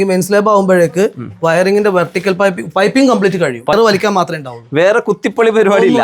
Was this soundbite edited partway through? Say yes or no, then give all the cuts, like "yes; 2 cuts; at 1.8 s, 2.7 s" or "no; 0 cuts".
yes; 1 cut; at 3.7 s